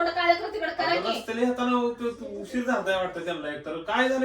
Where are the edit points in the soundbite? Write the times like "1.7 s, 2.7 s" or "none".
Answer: 1.2 s